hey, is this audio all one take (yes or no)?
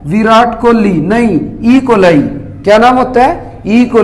yes